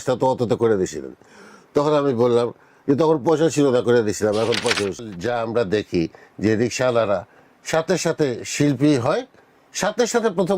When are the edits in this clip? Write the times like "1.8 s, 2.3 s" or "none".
5.1 s